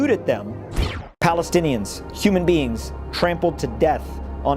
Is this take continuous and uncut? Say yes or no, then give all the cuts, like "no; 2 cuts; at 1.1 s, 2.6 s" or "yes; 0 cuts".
no; 1 cut; at 0.9 s